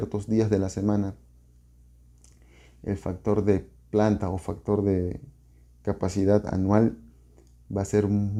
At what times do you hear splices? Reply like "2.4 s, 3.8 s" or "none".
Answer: none